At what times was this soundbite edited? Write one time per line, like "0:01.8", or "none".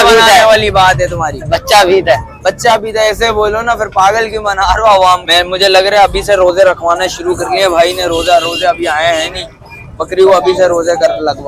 0:05.2